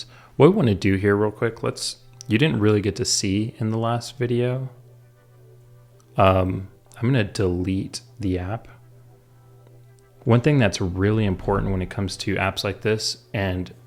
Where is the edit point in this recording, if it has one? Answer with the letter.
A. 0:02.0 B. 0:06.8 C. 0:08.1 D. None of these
D